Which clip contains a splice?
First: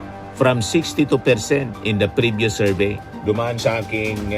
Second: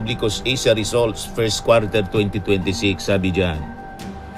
first; 1 cut; at 3.0 s

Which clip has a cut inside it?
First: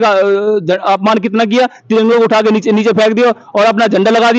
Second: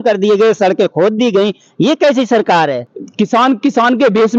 second; 1 cut; at 2.9 s

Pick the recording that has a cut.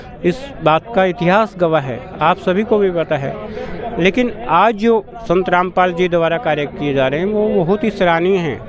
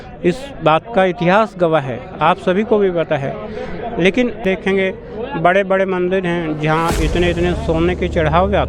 second; 1 cut; at 4.4 s

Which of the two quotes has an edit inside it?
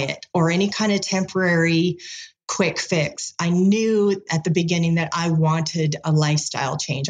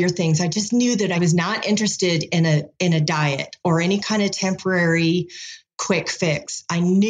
second; 1 cut; at 1.2 s

